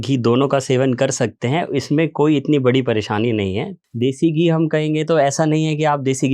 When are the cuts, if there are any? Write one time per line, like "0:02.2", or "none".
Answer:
0:03.7